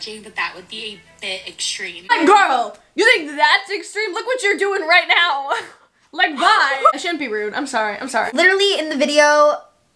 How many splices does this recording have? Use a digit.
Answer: 3